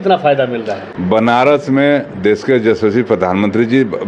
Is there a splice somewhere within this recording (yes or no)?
no